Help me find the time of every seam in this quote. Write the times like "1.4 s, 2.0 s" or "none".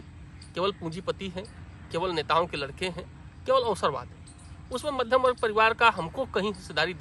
none